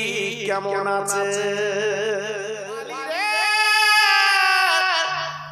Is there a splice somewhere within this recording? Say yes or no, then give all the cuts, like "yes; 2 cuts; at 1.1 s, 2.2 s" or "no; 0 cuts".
yes; 1 cut; at 2.8 s